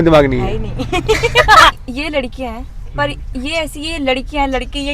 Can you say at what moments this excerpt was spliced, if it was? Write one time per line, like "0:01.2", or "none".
0:01.7